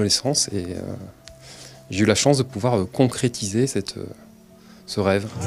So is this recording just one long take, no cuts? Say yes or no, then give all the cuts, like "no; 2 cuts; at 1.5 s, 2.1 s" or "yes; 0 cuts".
no; 1 cut; at 3.2 s